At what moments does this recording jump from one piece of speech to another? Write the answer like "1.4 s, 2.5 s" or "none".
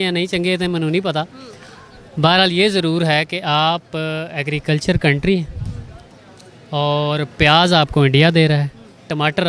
none